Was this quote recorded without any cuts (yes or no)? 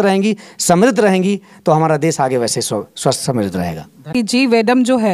no